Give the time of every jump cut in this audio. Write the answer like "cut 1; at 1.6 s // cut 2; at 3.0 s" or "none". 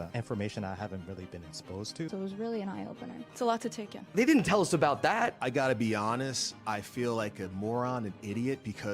cut 1; at 2.1 s

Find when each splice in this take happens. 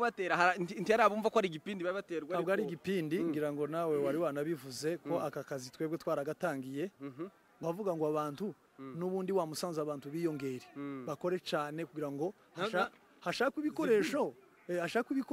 cut 1; at 7.4 s

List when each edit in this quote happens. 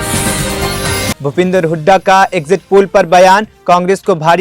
none

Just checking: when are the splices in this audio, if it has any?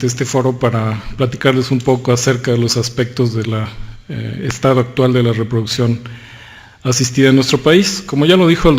cut 1; at 3.7 s

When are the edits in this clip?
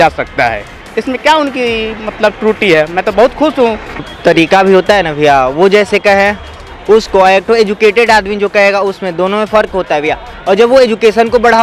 cut 1; at 4.1 s

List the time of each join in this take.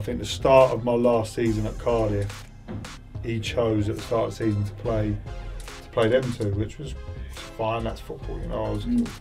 none

